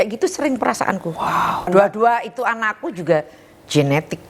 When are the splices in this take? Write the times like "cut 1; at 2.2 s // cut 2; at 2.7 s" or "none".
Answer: cut 1; at 1.6 s